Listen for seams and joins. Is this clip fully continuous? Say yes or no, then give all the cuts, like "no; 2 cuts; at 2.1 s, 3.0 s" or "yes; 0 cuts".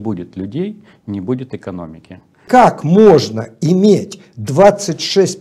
no; 1 cut; at 2.4 s